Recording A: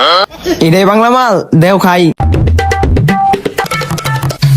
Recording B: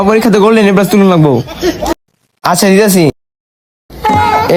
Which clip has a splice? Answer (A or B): A